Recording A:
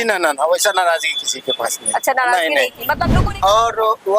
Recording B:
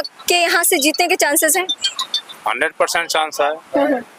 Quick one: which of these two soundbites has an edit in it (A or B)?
A